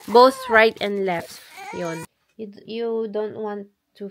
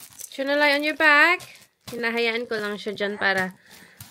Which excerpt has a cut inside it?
first; 1 cut; at 2.2 s

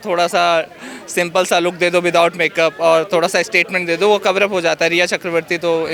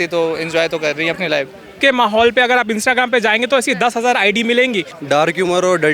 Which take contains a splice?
second; 2 cuts; at 1.8 s, 4.9 s

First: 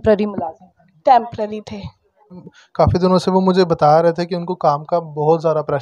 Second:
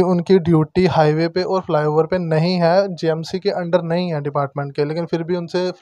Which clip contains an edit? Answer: first; 1 cut; at 2.5 s

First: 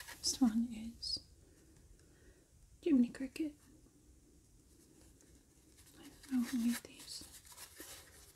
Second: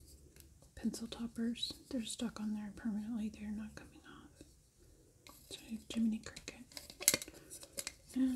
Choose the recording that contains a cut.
second; 1 cut; at 5.3 s

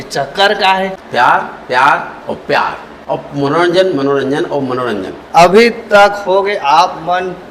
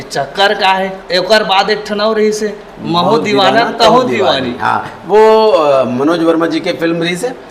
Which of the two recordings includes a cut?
first; 2 cuts; at 1.0 s, 5.2 s

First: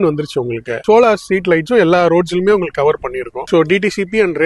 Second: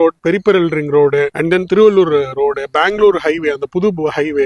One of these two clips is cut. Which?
first; 2 cuts; at 0.8 s, 3.5 s

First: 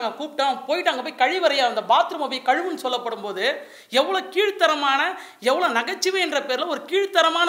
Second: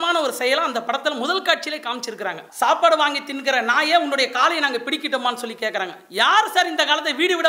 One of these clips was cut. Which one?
second; 1 cut; at 2.4 s

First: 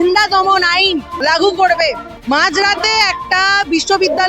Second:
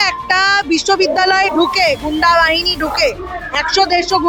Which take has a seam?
first; 2 cuts; at 1.1 s, 2.1 s

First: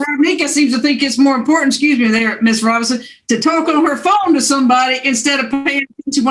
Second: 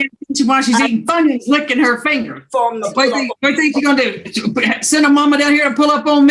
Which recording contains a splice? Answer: second; 1 cut; at 2.4 s

